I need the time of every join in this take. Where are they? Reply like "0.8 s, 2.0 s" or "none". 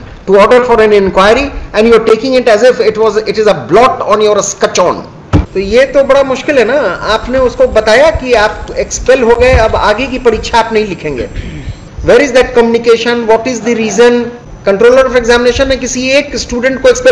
5.5 s, 14.4 s